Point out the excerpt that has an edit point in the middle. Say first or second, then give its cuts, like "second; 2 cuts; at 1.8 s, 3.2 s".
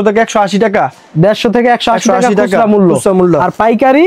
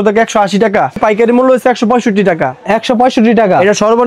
second; 1 cut; at 1.0 s